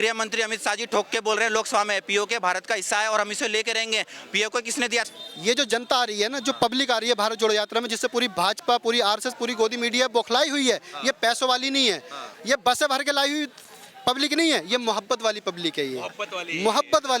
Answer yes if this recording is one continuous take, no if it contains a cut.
no